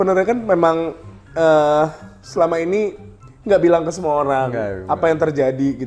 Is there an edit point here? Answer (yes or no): no